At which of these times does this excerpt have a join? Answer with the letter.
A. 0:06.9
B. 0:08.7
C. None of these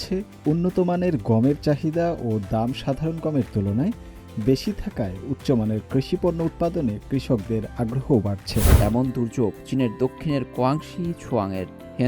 B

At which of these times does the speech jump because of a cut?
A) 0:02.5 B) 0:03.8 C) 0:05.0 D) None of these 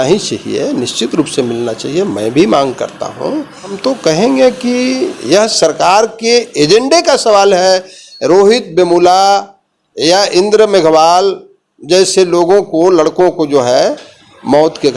B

